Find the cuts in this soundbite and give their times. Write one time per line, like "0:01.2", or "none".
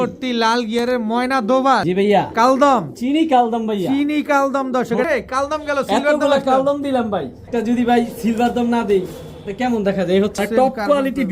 0:01.8
0:05.0
0:07.4
0:10.4